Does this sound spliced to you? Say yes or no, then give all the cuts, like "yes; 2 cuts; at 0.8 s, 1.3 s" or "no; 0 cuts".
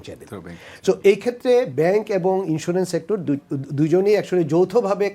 no; 0 cuts